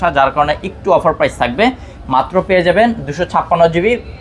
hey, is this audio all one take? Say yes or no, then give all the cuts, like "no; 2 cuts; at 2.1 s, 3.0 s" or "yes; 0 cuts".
yes; 0 cuts